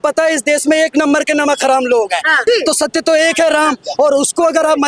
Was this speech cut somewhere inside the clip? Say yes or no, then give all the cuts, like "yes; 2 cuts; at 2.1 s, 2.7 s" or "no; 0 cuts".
yes; 1 cut; at 2.4 s